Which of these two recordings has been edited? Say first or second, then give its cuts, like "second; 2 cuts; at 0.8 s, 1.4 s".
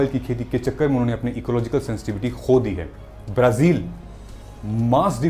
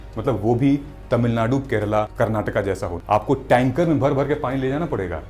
second; 2 cuts; at 2.1 s, 3.0 s